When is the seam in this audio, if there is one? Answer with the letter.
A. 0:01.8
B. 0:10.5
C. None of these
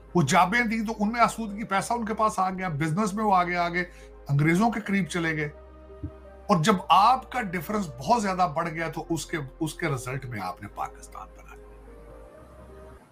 C